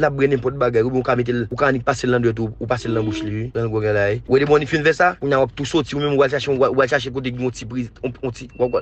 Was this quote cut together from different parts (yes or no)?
yes